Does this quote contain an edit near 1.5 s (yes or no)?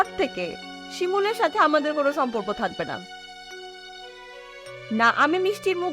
no